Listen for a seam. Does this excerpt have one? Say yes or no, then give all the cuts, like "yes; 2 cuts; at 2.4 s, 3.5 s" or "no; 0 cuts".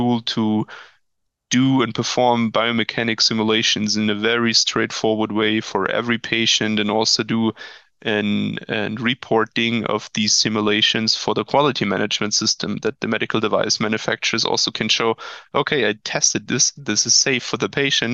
no; 0 cuts